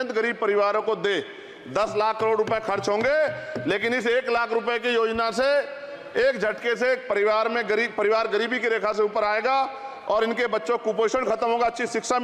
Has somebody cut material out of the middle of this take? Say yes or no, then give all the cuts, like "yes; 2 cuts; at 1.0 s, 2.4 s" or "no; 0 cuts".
no; 0 cuts